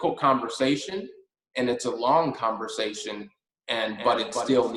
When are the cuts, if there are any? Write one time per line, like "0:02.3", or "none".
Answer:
none